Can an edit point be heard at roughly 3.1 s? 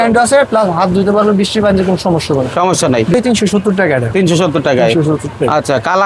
yes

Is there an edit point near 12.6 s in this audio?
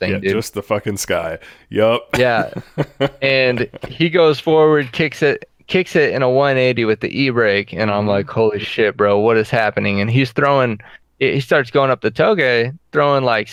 no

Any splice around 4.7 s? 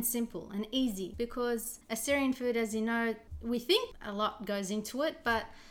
no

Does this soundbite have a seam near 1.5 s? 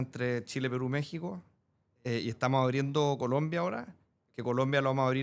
no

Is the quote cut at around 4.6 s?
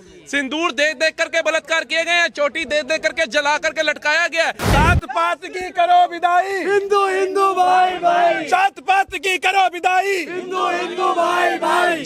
yes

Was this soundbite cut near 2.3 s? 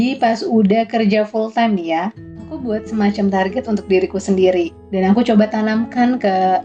no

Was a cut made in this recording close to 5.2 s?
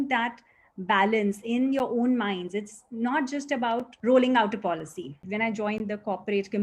yes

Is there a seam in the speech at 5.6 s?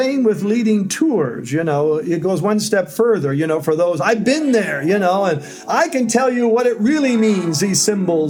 no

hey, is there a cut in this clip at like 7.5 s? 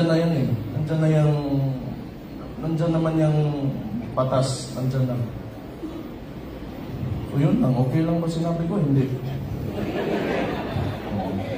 no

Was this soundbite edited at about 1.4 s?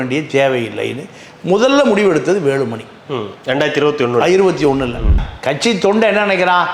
no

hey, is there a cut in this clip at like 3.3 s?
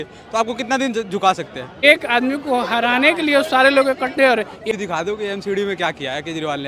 no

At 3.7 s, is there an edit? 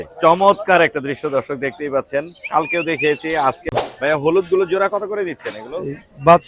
yes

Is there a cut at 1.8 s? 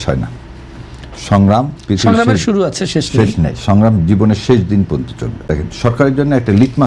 no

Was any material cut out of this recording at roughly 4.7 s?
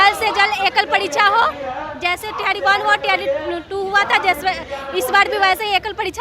no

